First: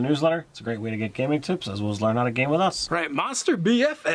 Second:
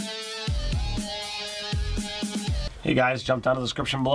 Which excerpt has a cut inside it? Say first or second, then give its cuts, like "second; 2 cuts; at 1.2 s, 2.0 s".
second; 1 cut; at 2.6 s